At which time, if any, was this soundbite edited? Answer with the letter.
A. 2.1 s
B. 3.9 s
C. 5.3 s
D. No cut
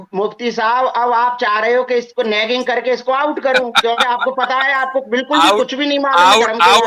D